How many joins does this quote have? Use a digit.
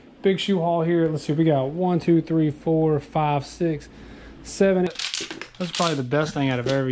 1